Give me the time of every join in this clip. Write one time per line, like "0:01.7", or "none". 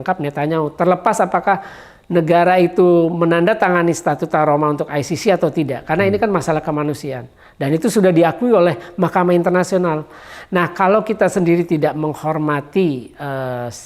none